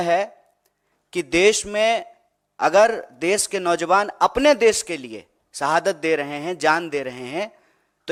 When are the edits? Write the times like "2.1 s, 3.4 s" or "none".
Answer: none